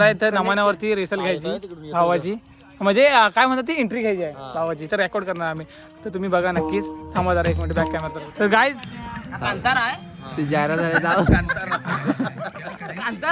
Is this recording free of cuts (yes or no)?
no